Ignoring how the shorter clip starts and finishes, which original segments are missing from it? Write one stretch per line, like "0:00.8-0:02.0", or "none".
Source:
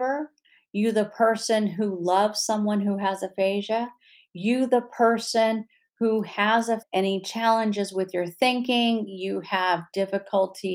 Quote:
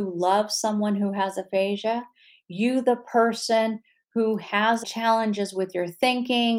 0:06.7-0:07.2